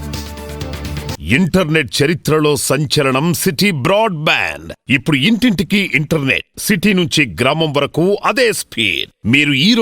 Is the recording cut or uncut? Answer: cut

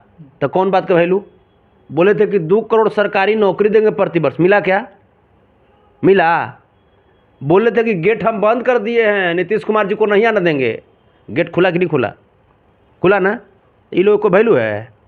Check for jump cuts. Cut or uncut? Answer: uncut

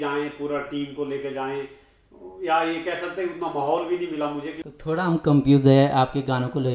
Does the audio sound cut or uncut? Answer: cut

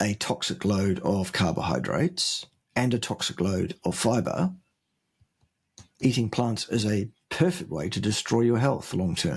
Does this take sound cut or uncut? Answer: uncut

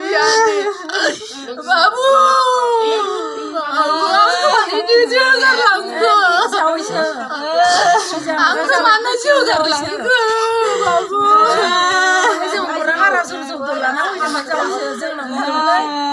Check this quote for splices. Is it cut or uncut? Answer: uncut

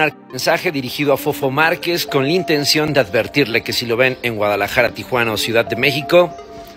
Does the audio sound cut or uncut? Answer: uncut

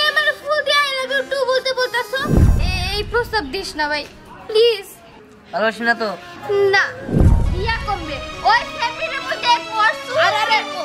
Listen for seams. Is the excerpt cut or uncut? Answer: cut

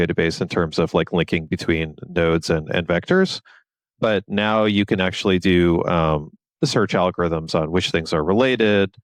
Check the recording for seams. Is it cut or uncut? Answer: uncut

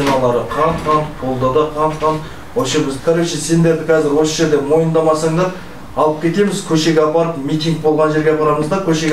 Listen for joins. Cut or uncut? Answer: cut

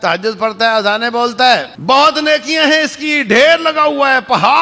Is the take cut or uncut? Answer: cut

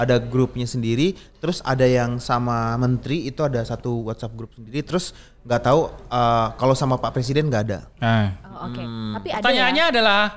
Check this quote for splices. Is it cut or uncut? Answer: uncut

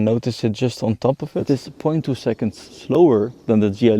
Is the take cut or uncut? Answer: cut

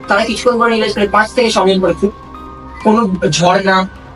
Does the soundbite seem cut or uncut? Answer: uncut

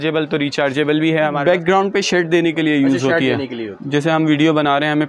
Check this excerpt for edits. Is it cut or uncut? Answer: cut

